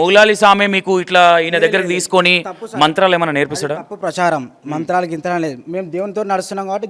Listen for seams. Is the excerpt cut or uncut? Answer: uncut